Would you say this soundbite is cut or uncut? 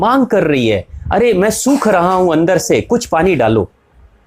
uncut